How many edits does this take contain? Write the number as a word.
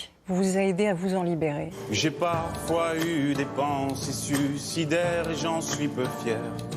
one